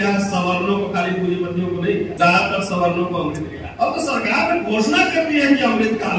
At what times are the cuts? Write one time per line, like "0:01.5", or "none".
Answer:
0:02.1
0:03.6